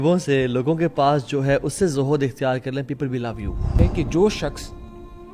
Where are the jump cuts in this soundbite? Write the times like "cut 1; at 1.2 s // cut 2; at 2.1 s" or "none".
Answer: cut 1; at 3.7 s